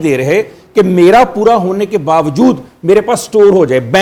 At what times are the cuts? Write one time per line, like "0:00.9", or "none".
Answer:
none